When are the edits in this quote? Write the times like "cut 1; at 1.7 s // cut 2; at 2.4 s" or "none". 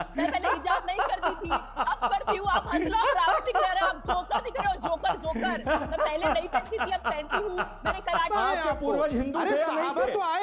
cut 1; at 8.3 s